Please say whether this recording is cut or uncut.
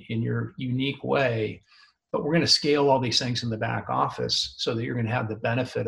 uncut